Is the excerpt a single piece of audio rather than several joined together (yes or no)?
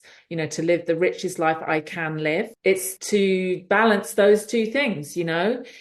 no